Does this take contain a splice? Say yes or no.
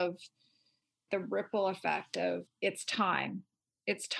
yes